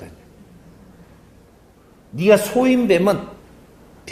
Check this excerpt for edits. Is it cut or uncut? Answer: uncut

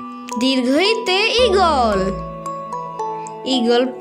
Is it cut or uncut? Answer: uncut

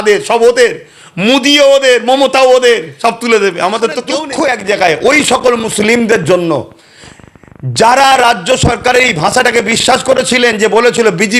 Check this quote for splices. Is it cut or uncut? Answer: cut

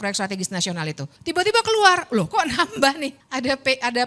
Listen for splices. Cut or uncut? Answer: cut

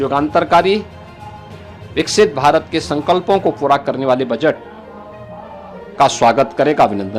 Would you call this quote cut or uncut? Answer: uncut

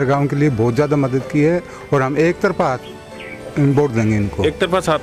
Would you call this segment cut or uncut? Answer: uncut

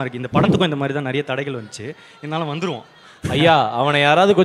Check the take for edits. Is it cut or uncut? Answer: uncut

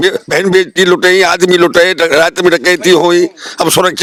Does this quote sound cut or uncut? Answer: uncut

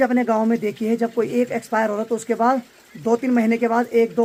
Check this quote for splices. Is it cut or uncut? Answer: uncut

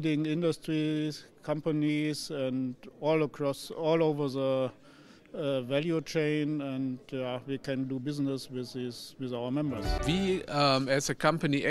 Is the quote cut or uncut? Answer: cut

